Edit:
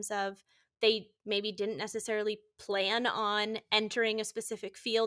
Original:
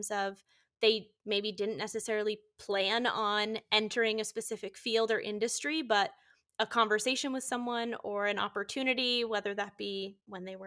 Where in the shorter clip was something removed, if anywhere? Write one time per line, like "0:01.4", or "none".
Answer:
none